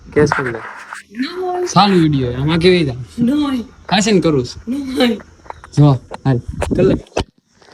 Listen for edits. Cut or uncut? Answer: uncut